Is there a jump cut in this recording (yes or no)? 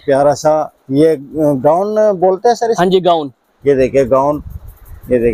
no